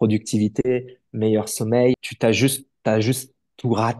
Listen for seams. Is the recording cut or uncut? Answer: cut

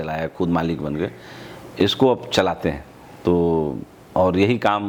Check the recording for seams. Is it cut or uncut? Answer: uncut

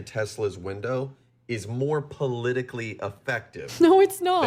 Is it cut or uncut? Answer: uncut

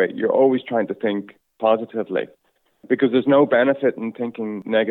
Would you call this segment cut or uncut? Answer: uncut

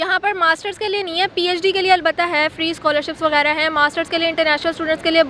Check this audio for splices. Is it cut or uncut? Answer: uncut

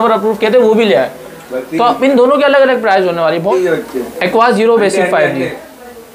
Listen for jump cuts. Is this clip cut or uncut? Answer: cut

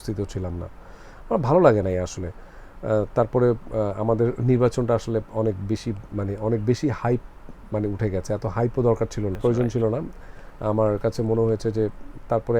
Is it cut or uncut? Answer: cut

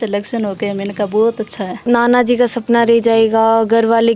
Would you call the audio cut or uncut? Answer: cut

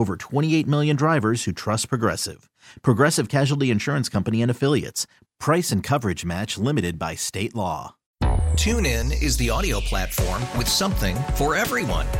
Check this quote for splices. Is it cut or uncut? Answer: cut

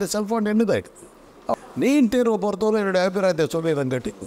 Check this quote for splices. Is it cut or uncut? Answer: cut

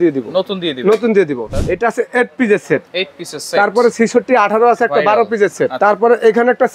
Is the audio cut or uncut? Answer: cut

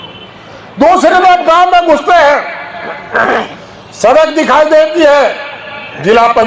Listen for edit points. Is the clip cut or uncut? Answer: uncut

